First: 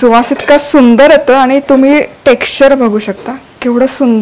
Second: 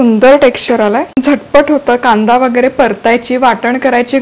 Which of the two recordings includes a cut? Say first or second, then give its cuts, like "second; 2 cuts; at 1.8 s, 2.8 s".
second; 1 cut; at 1.2 s